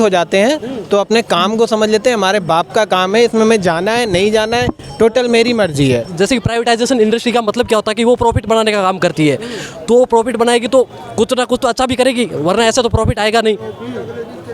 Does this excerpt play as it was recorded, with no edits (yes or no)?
no